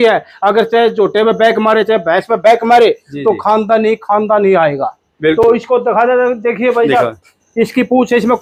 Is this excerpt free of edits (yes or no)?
yes